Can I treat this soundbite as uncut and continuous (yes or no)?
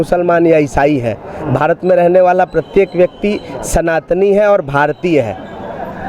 yes